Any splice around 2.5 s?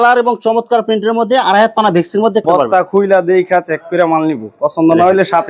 yes; 1 cut; at 2.5 s

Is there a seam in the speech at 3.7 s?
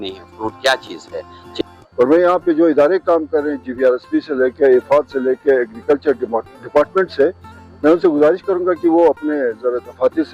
no; 1 cut; at 1.5 s

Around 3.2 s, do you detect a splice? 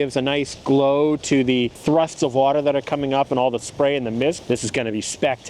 no; 2 cuts; at 1.8 s, 4.4 s

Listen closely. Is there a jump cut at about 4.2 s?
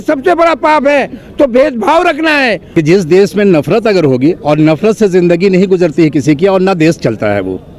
no; 1 cut; at 2.6 s

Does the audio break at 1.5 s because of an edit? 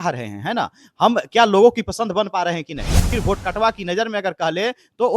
no; 1 cut; at 3.1 s

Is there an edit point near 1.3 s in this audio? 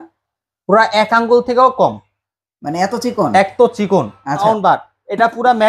no; 1 cut; at 4.4 s

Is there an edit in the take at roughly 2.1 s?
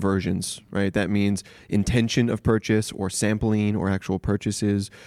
no; 0 cuts

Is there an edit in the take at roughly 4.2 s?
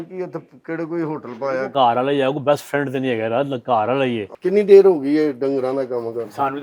yes; 2 cuts; at 1.7 s, 4.2 s

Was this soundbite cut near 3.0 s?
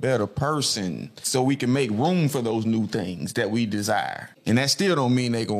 no; 2 cuts; at 1.2 s, 4.3 s

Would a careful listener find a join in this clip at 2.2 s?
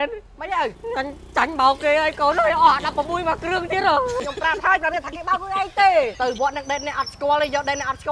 no; 3 cuts; at 0.8 s, 4.2 s, 6.1 s

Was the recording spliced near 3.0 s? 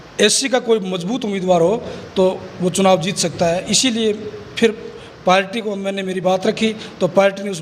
no; 0 cuts

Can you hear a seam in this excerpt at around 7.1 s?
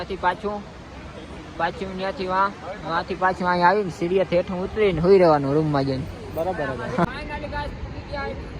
yes; 1 cut; at 7.1 s

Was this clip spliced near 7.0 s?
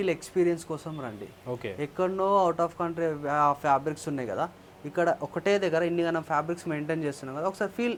no; 0 cuts

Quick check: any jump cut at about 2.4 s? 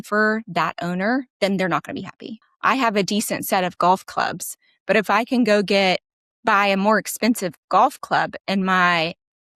yes; 1 cut; at 2.4 s

